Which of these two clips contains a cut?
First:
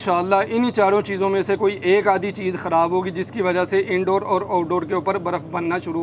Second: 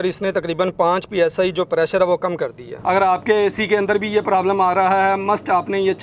second; 1 cut; at 2.7 s

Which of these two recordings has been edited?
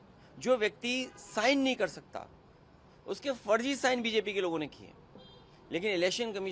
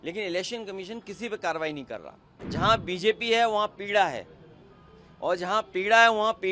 second; 1 cut; at 2.4 s

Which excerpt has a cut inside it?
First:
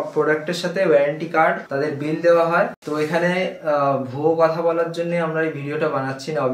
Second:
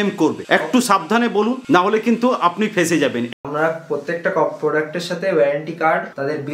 second; 1 cut; at 3.3 s

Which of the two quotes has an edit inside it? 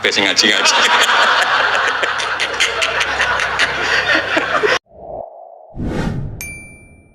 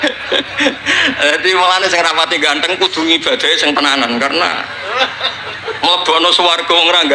first; 1 cut; at 4.9 s

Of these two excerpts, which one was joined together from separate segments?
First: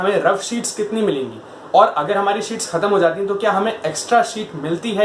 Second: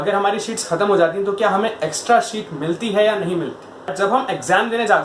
second; 1 cut; at 3.9 s

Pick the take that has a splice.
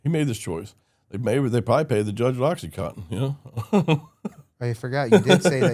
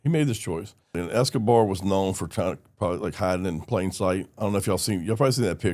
second; 1 cut; at 1.0 s

